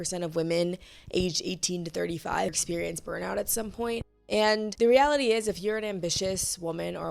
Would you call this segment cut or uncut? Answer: cut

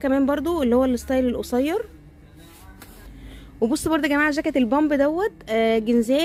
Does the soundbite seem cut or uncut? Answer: uncut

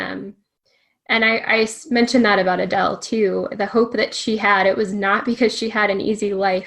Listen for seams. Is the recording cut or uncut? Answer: uncut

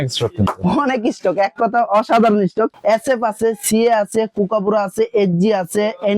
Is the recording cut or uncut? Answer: cut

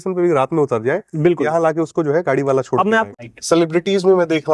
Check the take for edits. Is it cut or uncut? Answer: cut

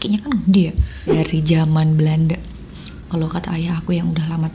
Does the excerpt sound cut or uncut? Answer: cut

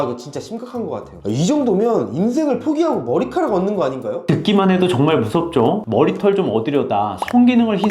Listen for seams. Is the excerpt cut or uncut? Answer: cut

